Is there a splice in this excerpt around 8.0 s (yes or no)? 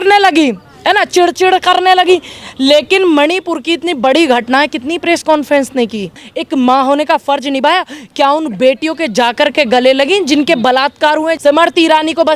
no